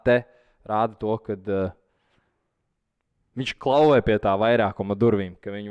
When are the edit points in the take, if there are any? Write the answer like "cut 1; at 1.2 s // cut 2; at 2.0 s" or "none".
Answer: none